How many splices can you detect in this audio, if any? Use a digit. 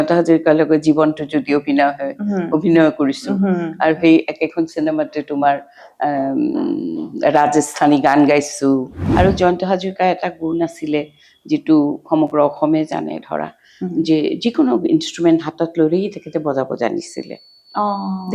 1